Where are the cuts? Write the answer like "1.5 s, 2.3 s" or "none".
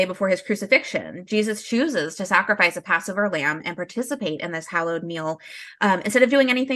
none